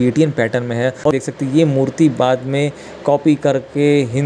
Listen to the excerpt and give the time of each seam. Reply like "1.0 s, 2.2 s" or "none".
1.1 s